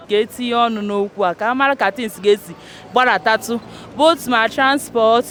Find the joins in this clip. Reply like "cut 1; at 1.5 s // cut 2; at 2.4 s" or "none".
none

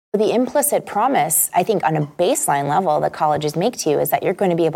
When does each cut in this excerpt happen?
none

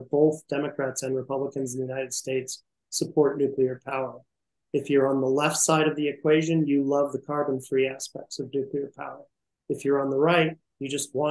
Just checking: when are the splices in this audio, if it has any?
none

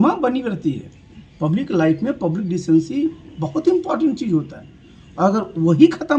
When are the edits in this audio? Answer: none

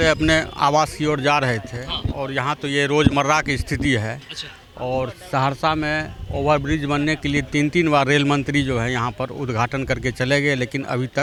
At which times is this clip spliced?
none

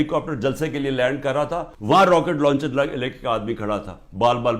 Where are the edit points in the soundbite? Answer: cut 1; at 1.7 s

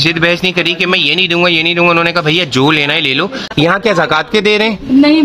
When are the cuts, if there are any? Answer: cut 1; at 3.5 s

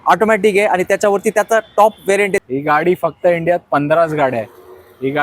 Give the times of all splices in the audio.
cut 1; at 2.4 s

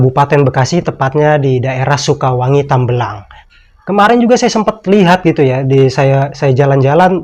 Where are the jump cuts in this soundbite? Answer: none

